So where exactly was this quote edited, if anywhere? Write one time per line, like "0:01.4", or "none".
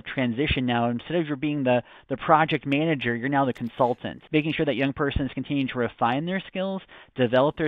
0:04.1